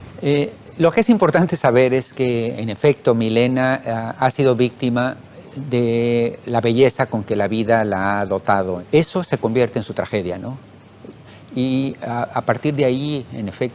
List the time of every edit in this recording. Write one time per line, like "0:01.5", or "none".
none

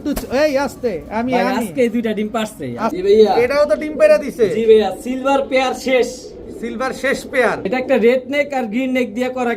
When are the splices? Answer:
0:02.9
0:07.6

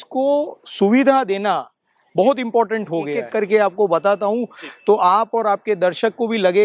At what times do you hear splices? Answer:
0:03.2

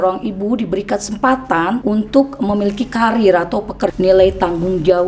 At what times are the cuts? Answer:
0:01.8
0:03.8

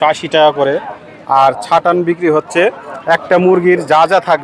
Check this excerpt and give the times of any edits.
none

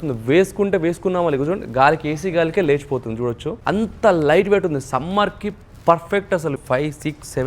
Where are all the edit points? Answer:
0:03.5
0:06.6

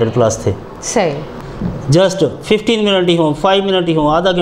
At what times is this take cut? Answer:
0:01.3

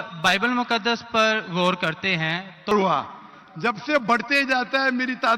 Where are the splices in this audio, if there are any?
0:02.7

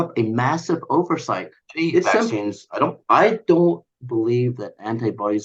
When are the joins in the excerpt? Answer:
0:02.3

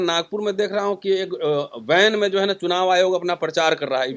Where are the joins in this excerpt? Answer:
none

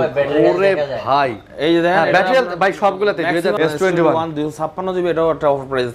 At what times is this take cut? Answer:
0:03.6

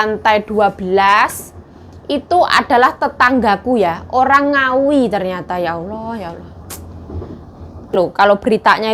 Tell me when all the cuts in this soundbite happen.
0:07.9

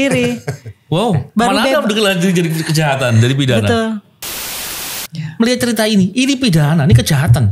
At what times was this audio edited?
0:04.6

